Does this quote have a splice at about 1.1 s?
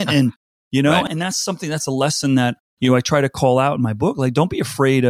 yes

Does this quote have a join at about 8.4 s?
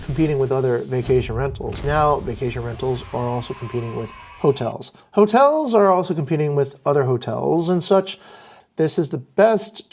yes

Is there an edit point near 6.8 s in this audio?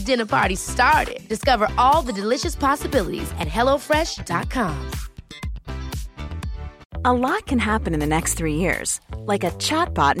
yes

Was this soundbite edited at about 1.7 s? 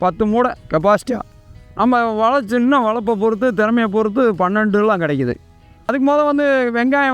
no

